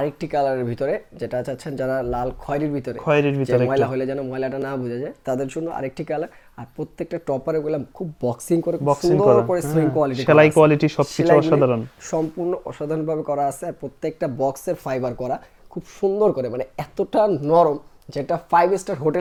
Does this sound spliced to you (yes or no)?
no